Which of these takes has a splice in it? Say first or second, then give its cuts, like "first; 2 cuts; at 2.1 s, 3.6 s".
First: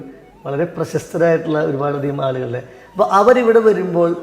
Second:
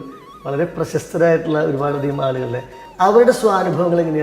second; 1 cut; at 2.8 s